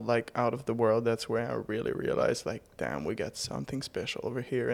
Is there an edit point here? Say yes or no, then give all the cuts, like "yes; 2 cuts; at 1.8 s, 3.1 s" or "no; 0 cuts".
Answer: no; 0 cuts